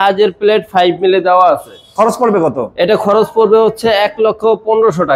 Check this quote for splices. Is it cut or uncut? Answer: uncut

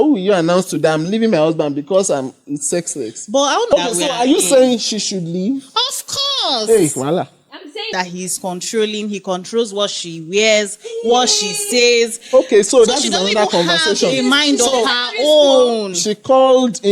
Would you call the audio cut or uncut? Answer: cut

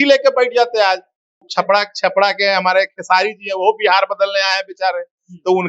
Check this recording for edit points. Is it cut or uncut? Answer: cut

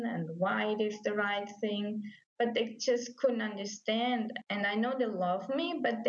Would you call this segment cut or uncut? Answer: cut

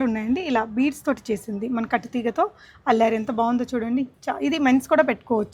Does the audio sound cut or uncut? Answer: uncut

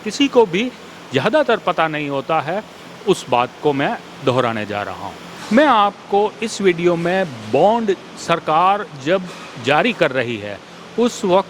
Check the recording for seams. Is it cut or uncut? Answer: uncut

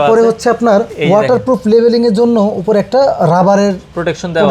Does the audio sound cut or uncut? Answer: cut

